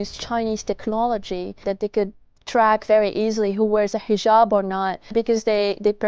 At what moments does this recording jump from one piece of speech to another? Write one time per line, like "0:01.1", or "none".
0:01.6
0:05.1